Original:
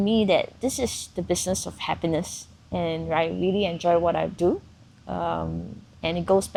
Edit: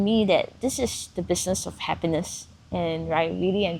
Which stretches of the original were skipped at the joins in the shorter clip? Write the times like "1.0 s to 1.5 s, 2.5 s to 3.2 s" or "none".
none